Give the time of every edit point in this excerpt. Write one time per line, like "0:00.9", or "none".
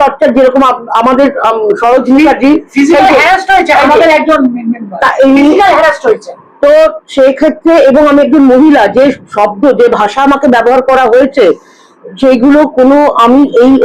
none